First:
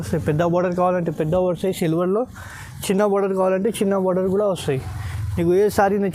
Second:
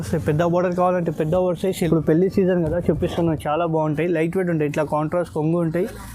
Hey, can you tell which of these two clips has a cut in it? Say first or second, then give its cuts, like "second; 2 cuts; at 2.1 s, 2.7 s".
second; 1 cut; at 1.9 s